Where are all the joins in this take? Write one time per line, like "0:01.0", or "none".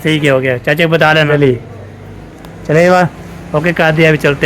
0:01.3